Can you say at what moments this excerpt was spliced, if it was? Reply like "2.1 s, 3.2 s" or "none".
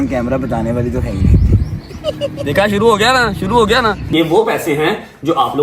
2.3 s, 4.0 s